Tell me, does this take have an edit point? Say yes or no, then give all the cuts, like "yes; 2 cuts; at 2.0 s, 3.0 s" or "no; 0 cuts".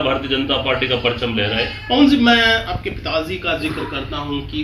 no; 0 cuts